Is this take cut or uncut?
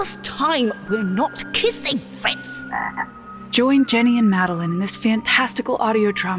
uncut